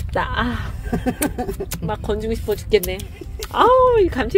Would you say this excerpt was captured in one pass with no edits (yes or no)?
yes